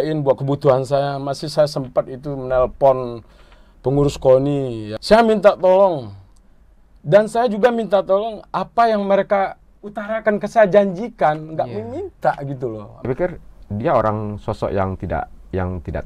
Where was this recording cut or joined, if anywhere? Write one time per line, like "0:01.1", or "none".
0:04.9
0:12.9